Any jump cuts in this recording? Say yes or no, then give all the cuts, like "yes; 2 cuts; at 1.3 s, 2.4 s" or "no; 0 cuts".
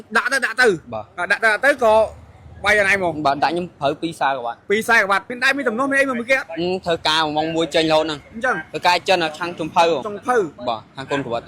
yes; 1 cut; at 5.3 s